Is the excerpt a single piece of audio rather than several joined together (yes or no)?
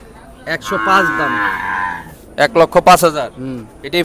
yes